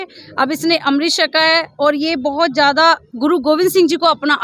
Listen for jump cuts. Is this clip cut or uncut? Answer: uncut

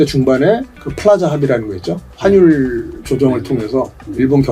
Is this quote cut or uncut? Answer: uncut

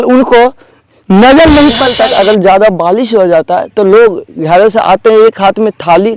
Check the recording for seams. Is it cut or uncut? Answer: cut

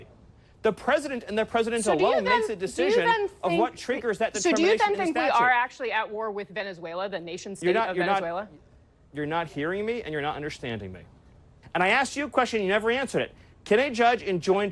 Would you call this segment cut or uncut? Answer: cut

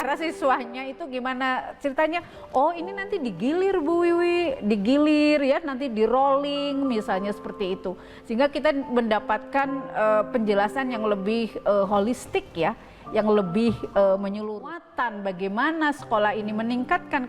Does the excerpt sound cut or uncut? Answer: cut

